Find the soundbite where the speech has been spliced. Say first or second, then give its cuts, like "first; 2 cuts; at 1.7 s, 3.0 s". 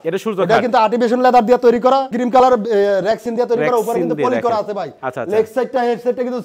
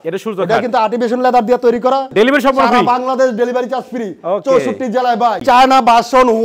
second; 2 cuts; at 2.1 s, 5.4 s